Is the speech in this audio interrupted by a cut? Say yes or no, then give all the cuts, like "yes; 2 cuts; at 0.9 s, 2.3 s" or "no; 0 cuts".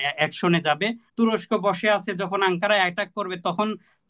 yes; 1 cut; at 1.0 s